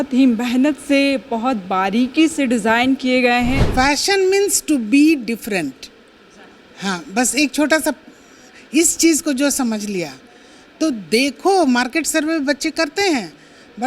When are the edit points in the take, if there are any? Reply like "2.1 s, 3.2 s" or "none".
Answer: 3.6 s